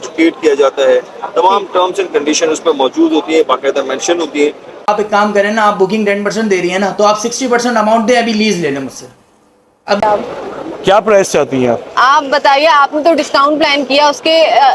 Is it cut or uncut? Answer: cut